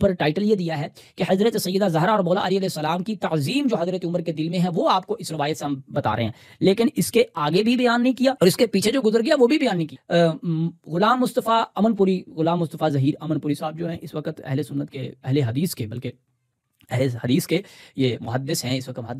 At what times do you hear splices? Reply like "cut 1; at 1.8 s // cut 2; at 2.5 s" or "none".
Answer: cut 1; at 9.9 s